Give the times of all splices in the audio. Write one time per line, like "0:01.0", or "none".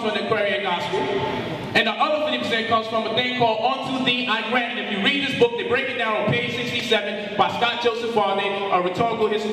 0:07.9